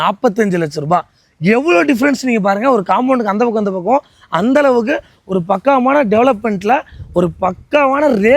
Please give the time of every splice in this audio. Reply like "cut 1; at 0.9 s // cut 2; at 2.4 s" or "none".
none